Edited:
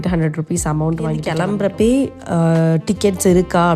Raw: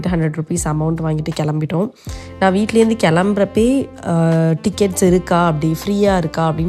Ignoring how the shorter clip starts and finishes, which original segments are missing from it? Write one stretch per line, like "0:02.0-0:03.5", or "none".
0:01.3-0:03.0